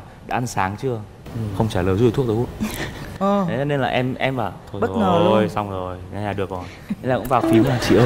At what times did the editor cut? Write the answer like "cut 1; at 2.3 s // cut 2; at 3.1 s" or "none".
none